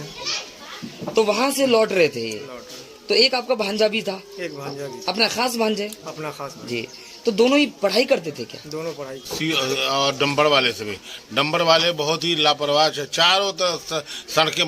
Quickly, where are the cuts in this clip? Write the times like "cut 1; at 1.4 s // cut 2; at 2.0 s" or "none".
cut 1; at 9.2 s